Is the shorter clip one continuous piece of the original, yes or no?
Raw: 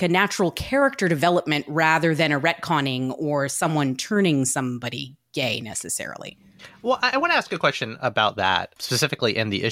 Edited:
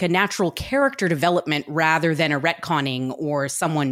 yes